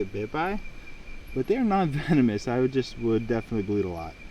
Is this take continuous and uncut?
yes; 0 cuts

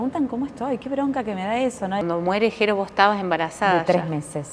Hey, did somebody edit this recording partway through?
yes; 1 cut; at 2.1 s

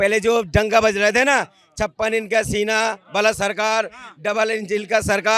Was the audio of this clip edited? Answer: no; 0 cuts

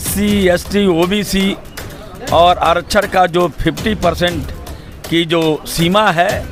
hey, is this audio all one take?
yes; 0 cuts

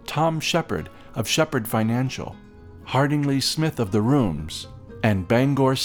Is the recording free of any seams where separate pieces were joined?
yes; 0 cuts

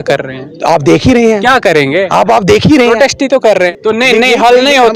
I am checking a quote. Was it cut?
yes; 1 cut; at 3.7 s

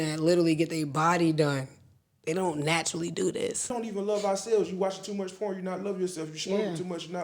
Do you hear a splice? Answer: yes; 1 cut; at 3.6 s

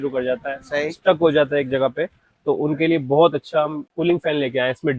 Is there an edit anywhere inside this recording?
yes; 1 cut; at 3.9 s

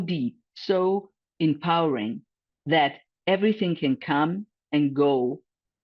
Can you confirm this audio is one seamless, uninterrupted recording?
no; 1 cut; at 3.1 s

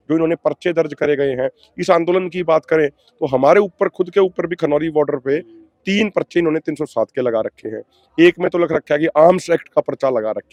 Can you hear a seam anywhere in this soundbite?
no; 0 cuts

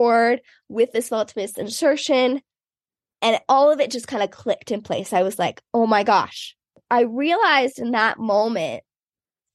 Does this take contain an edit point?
yes; 1 cut; at 6.8 s

